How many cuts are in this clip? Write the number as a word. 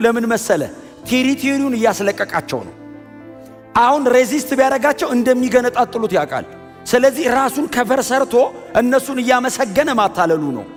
zero